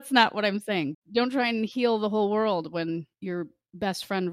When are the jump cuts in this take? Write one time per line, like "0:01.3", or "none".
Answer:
0:01.0
0:03.1